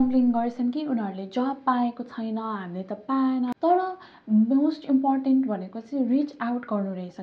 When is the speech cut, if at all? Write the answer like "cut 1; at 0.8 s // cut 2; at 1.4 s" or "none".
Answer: cut 1; at 3.5 s